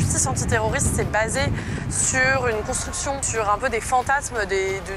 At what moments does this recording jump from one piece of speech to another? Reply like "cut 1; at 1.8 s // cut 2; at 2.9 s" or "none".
cut 1; at 3.3 s